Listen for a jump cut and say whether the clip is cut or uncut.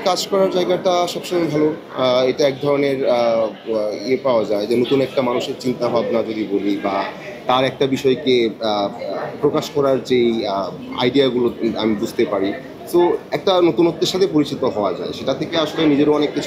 uncut